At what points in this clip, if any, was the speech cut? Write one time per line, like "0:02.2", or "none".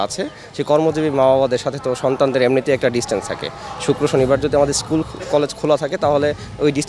none